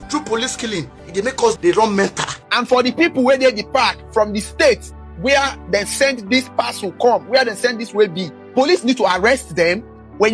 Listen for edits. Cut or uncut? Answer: cut